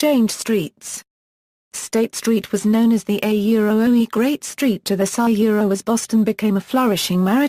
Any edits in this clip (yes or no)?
no